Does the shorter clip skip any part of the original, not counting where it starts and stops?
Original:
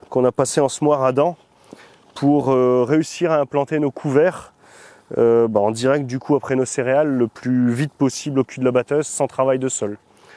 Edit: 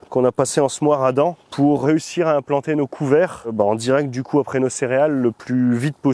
yes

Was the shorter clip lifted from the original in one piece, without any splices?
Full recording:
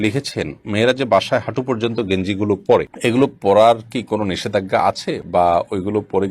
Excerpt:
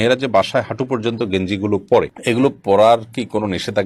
yes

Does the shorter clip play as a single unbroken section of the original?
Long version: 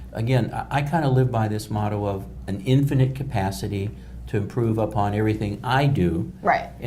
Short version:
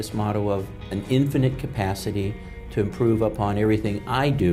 yes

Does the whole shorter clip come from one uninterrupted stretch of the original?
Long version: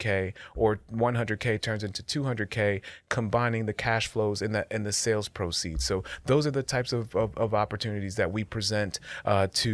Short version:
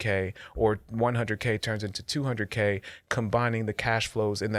yes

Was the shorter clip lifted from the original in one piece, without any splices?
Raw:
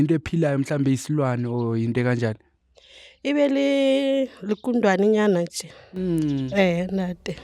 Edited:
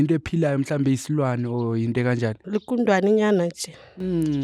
no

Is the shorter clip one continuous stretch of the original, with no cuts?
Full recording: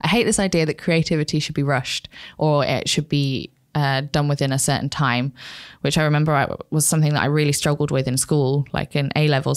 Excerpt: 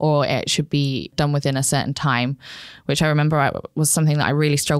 no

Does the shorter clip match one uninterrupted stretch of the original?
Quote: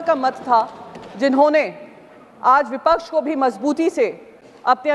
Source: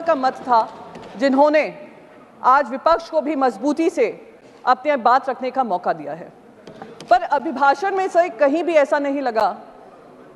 yes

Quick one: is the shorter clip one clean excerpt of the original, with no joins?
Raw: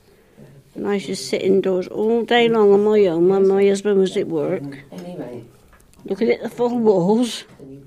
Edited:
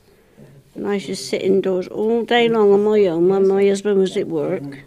yes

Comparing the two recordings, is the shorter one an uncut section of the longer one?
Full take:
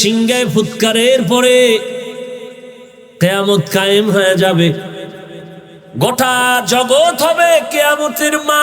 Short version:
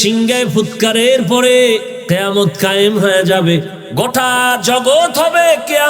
no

